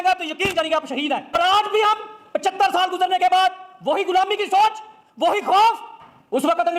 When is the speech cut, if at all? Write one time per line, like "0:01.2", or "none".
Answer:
0:01.3